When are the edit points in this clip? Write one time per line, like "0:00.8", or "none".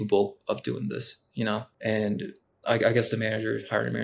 0:01.7